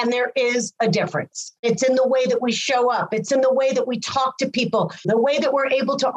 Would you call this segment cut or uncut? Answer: cut